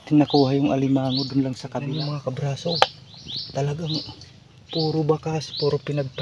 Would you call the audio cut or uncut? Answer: cut